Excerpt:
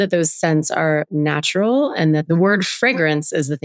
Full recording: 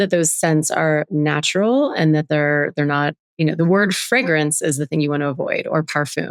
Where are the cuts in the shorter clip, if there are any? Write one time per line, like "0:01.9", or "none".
0:02.2